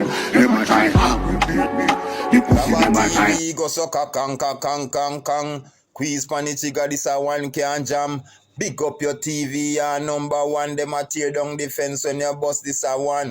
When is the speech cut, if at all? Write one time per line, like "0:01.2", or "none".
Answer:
0:03.4